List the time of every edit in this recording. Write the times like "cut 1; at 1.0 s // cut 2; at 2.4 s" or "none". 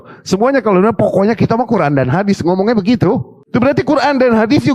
none